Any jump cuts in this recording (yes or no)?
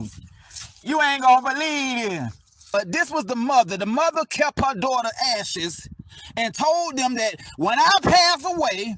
yes